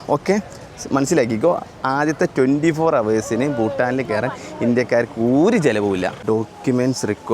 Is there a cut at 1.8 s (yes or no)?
no